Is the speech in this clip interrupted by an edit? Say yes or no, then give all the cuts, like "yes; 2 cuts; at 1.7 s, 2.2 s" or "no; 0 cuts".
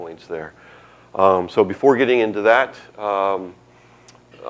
no; 0 cuts